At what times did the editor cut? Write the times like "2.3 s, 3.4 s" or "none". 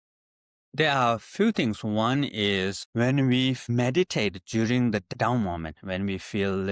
2.8 s, 3.6 s, 5.1 s